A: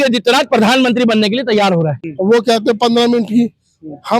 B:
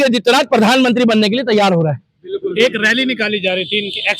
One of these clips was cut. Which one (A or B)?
A